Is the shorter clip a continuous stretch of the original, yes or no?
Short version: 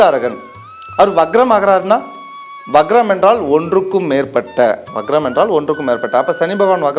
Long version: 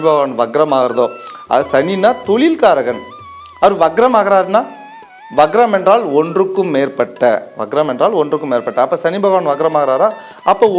yes